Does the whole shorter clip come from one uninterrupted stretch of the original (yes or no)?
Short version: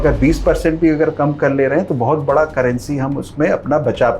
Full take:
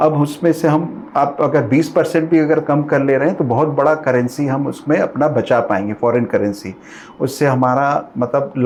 yes